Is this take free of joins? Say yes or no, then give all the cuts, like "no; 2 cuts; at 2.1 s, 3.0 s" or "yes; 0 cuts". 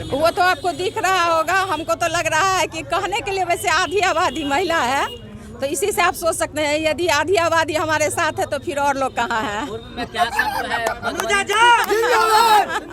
yes; 0 cuts